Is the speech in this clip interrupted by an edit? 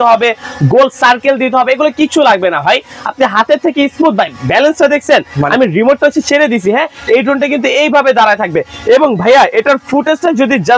no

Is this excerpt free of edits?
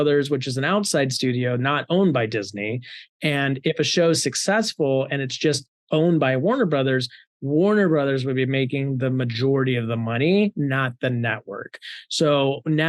yes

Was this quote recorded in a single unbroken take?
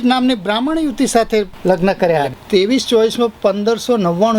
no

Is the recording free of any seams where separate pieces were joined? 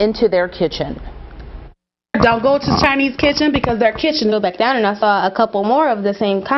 yes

